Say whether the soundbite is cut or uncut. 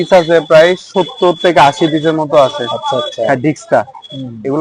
uncut